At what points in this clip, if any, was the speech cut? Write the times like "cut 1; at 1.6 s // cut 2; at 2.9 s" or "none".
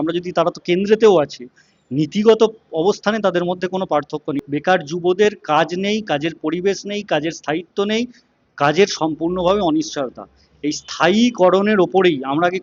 cut 1; at 4.4 s